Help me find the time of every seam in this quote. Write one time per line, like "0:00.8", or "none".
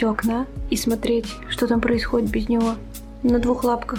none